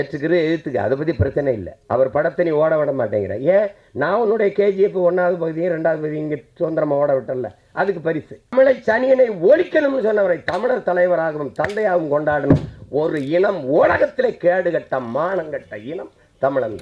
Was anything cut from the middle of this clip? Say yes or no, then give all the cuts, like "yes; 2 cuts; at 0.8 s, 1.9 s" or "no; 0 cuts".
yes; 1 cut; at 8.5 s